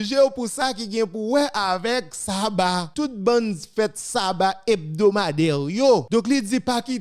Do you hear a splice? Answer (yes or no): yes